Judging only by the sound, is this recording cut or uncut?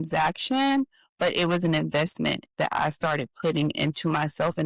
uncut